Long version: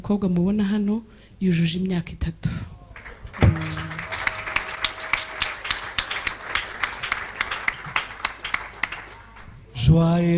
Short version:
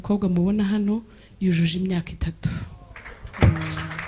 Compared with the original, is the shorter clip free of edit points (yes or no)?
yes